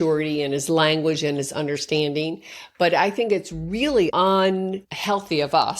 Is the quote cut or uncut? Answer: cut